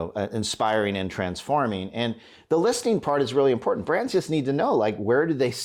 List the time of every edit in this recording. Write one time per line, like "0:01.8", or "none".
none